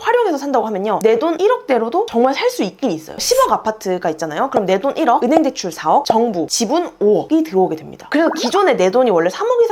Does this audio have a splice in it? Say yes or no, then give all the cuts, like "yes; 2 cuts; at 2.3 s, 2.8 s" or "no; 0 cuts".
no; 0 cuts